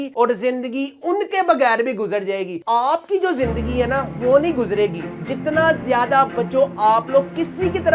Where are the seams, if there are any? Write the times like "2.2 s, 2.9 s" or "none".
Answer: 2.6 s